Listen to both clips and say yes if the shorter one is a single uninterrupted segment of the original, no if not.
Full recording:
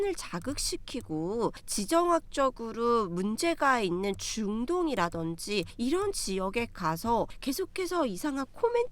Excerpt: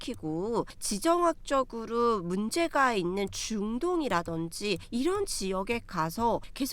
yes